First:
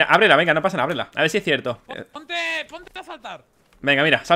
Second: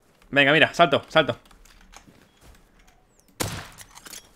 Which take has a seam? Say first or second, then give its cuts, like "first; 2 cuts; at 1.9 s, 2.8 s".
first; 2 cuts; at 1.1 s, 1.8 s